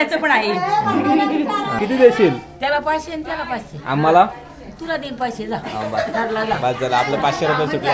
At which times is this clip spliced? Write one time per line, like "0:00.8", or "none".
0:01.7